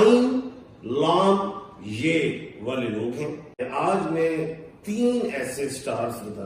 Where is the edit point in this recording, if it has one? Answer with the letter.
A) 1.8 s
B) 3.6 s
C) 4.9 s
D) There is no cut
B